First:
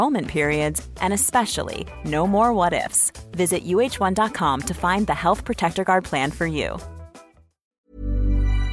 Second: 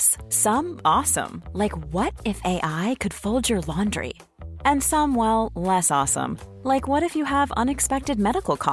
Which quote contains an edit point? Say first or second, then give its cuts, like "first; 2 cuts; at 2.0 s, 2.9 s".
first; 1 cut; at 7.7 s